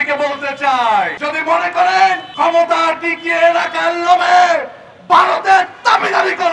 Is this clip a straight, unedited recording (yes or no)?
no